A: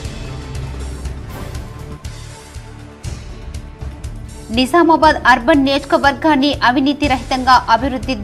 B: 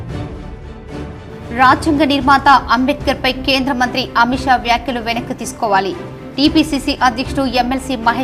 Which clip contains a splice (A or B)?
B